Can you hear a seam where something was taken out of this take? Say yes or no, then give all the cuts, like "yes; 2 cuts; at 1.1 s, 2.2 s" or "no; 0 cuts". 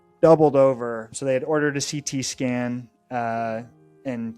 yes; 1 cut; at 1.1 s